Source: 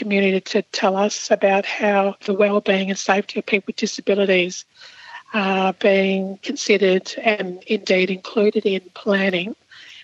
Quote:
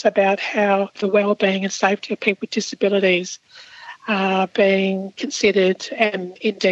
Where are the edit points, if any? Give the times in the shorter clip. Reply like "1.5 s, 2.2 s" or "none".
none